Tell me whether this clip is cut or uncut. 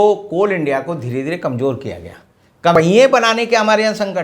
cut